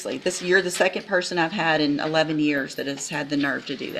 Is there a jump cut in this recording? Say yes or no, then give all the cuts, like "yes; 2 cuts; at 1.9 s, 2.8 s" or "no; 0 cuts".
no; 0 cuts